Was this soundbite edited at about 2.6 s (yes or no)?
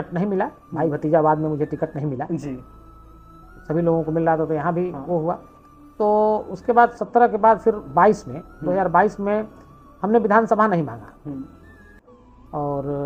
no